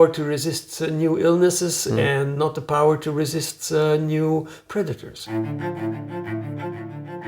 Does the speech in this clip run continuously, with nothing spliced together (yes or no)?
no